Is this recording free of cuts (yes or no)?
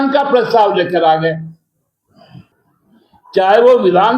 no